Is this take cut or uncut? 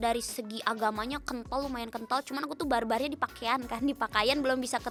uncut